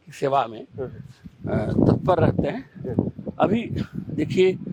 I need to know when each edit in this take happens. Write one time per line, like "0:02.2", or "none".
none